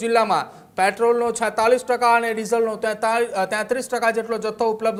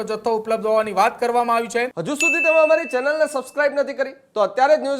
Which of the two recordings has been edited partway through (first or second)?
second